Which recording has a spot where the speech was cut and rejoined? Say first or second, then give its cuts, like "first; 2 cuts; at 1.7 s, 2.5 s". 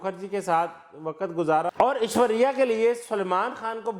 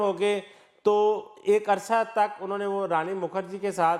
first; 1 cut; at 1.7 s